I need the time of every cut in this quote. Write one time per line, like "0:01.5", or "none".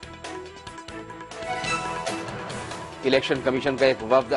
0:01.3
0:02.8